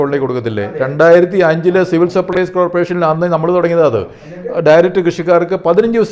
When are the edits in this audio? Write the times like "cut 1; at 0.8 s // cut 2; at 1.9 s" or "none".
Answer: none